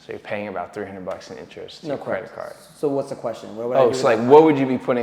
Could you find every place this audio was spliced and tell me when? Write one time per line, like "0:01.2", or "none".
none